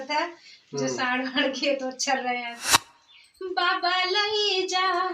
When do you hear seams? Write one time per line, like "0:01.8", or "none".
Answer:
0:02.6